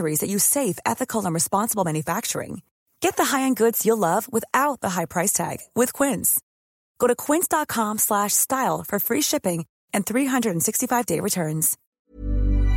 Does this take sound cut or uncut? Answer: cut